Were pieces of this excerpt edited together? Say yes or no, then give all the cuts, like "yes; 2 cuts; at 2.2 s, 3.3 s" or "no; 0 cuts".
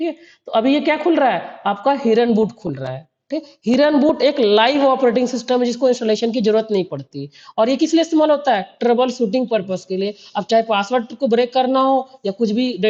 no; 0 cuts